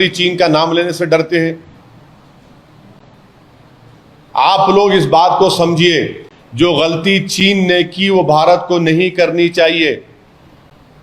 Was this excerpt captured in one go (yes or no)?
yes